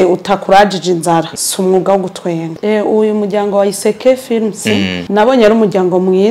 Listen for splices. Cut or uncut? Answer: cut